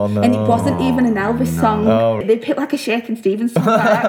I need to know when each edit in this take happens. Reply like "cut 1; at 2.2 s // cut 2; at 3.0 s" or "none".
cut 1; at 2.2 s